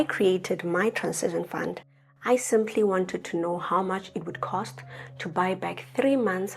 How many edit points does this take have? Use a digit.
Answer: 0